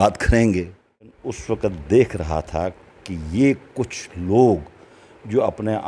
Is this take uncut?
no; 1 cut; at 1.2 s

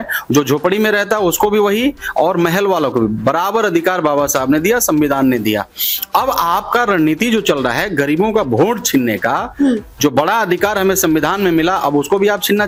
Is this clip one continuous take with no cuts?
yes; 0 cuts

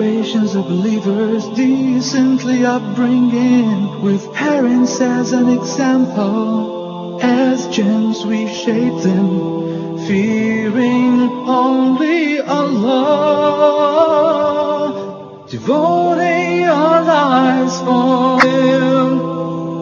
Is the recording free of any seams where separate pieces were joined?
no; 1 cut; at 18.4 s

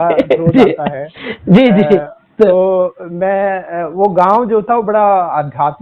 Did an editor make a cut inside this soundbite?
no; 0 cuts

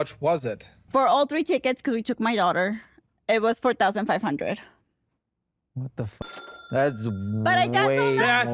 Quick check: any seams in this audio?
no; 0 cuts

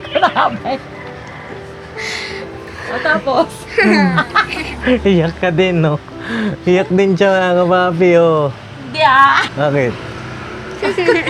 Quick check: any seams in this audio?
yes; 1 cut; at 9.4 s

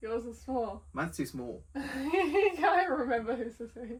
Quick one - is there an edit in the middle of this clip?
no; 0 cuts

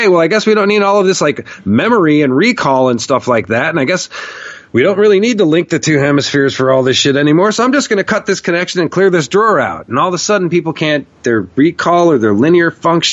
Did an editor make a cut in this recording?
no; 0 cuts

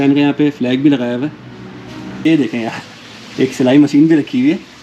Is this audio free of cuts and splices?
no; 1 cut; at 2.3 s

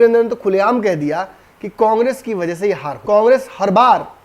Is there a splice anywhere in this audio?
yes; 1 cut; at 2.9 s

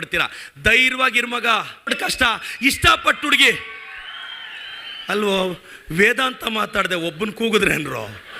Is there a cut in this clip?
yes; 1 cut; at 1.9 s

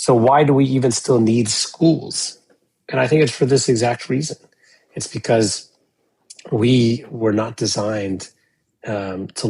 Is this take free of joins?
yes; 0 cuts

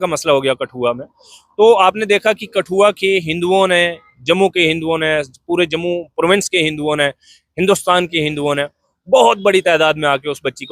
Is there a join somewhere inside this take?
no; 0 cuts

